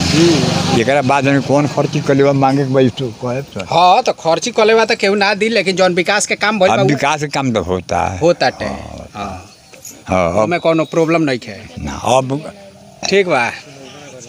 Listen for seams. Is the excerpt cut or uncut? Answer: uncut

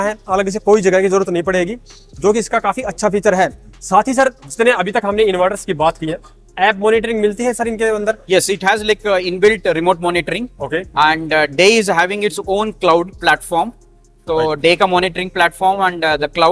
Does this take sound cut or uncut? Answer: uncut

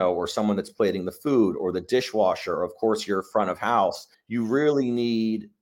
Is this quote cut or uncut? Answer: uncut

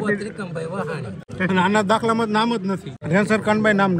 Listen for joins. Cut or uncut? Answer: cut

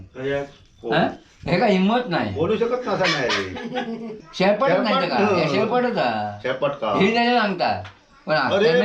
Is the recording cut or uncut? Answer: cut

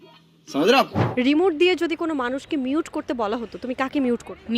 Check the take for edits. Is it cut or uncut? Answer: cut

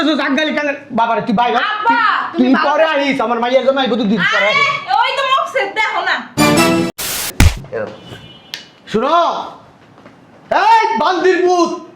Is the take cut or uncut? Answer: cut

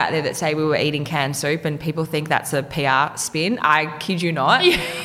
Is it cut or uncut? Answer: uncut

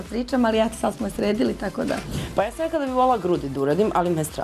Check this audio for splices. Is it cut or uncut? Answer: cut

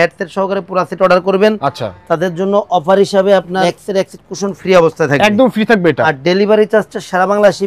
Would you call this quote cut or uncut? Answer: cut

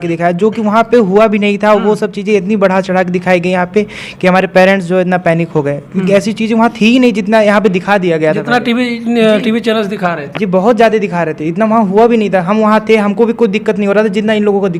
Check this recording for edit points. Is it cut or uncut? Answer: uncut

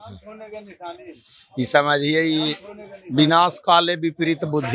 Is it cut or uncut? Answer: uncut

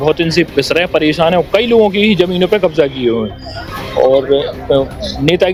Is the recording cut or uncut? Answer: uncut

